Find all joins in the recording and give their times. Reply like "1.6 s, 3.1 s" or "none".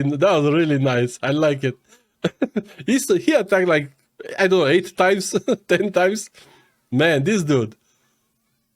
none